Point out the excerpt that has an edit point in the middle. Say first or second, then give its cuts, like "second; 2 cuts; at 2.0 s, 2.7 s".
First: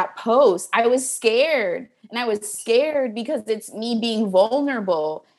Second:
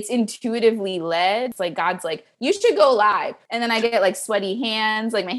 second; 2 cuts; at 1.5 s, 3.4 s